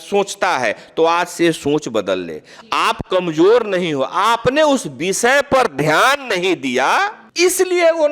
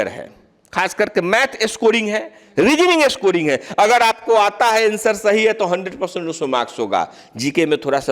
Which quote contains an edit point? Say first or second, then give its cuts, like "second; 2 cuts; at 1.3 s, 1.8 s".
first; 1 cut; at 7.2 s